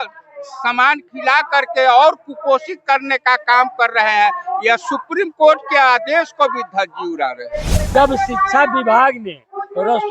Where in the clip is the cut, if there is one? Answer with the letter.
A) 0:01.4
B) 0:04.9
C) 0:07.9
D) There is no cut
C